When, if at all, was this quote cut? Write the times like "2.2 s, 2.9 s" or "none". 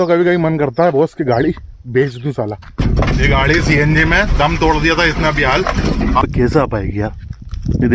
2.8 s, 6.2 s